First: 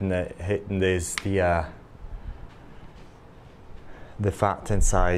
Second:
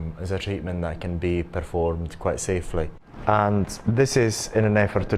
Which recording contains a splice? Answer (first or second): second